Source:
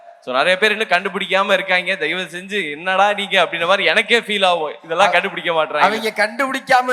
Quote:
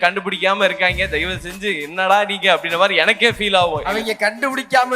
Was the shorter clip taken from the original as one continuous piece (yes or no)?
no